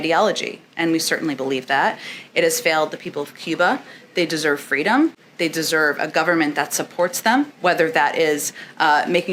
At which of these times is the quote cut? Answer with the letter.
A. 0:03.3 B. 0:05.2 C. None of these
C